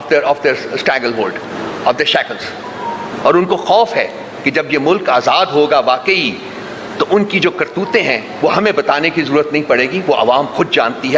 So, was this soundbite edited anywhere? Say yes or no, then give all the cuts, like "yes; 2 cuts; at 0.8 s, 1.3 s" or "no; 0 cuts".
no; 0 cuts